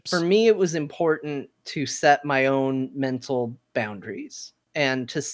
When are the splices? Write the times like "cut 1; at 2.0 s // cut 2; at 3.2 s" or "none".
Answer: none